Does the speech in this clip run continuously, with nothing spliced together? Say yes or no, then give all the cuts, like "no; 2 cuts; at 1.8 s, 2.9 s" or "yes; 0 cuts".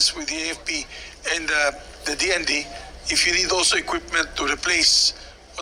yes; 0 cuts